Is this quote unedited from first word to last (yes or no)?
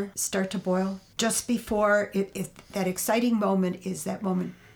no